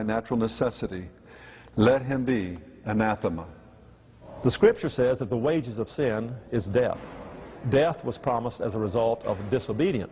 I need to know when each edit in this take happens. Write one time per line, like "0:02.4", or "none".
none